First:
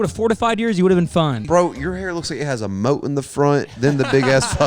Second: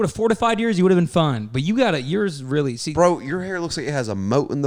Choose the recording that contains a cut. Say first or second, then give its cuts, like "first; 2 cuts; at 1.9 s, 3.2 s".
first; 1 cut; at 1.4 s